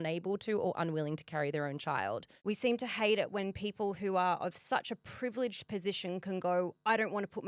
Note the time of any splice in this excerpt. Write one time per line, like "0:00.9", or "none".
0:02.3